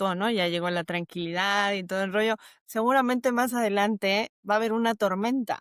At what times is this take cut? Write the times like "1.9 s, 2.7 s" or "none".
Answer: none